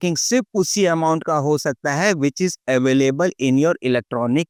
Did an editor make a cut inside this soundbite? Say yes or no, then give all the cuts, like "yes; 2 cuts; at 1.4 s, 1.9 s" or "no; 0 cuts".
no; 0 cuts